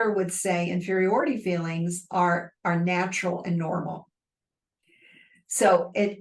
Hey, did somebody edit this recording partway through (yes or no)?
no